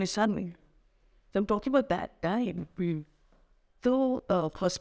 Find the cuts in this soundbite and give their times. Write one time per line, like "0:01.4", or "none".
none